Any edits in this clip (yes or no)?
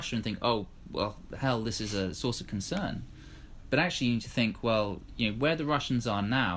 no